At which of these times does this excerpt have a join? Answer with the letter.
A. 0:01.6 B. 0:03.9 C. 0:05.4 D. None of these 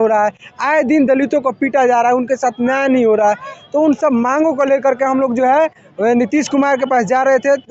D